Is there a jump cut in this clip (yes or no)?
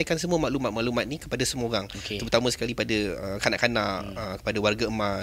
no